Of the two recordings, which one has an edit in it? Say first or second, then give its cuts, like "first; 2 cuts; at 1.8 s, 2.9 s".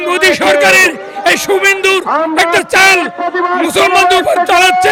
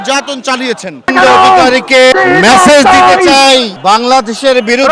second; 3 cuts; at 1.1 s, 2.1 s, 3.7 s